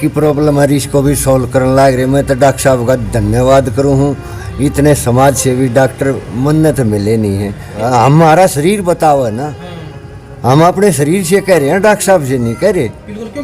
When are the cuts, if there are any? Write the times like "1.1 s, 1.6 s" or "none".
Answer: 7.8 s